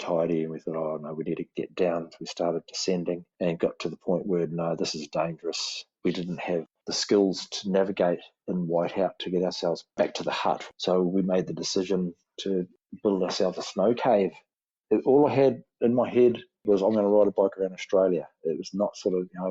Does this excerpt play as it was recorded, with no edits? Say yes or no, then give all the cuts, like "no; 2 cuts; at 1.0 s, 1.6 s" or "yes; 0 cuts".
no; 5 cuts; at 1.5 s, 6.0 s, 6.7 s, 14.6 s, 16.6 s